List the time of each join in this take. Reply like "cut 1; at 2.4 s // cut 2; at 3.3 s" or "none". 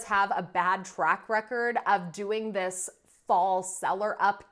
none